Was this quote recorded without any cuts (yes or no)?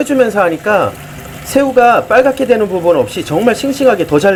yes